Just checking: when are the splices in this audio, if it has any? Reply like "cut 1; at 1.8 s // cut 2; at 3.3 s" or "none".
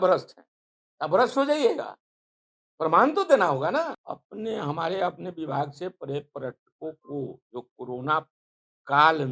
cut 1; at 4.1 s